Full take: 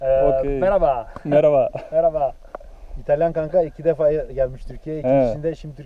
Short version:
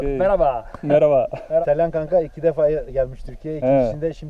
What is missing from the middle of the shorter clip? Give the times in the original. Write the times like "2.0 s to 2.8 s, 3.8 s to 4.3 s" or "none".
2.0 s to 3.0 s